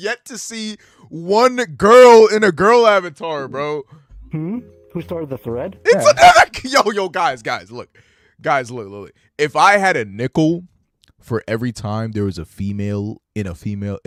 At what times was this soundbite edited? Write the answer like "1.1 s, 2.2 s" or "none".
none

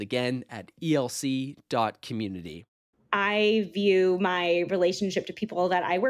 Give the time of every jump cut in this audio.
3.0 s

